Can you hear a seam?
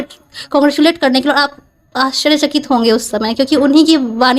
no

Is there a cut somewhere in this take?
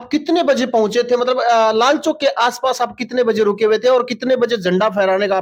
no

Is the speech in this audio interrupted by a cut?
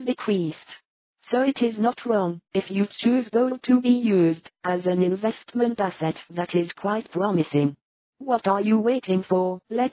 no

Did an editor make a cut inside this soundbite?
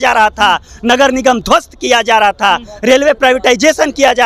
no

